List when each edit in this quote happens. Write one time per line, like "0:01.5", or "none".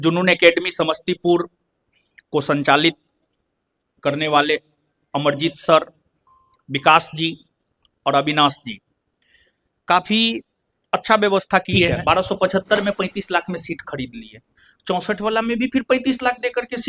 0:12.0